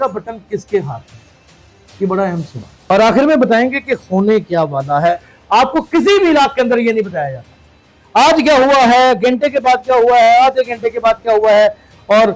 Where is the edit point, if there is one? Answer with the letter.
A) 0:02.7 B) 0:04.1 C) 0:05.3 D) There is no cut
A